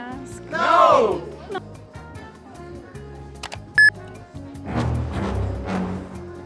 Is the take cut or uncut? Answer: cut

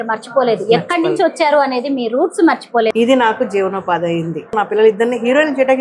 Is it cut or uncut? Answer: cut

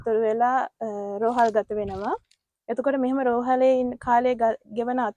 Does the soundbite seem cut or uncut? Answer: uncut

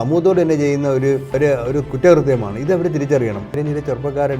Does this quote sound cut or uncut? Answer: cut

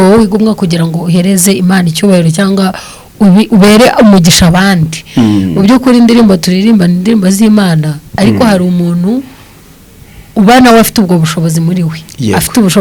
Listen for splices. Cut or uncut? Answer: uncut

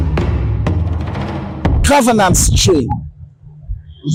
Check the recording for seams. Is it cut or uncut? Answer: uncut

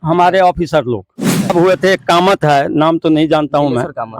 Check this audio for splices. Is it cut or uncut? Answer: cut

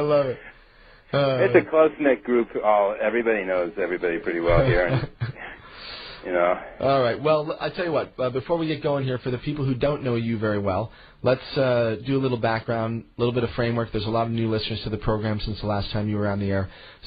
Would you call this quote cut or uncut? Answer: cut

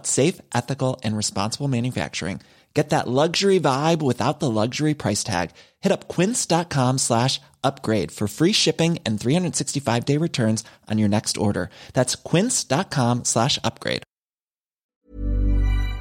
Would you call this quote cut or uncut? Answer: cut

